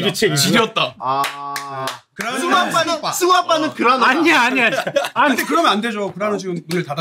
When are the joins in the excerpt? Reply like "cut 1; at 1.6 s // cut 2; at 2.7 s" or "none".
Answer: cut 1; at 1.0 s // cut 2; at 2.1 s // cut 3; at 5.2 s